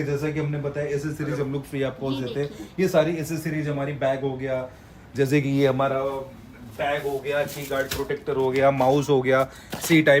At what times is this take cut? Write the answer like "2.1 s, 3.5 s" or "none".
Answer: none